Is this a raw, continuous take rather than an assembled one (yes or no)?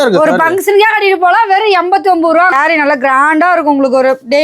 no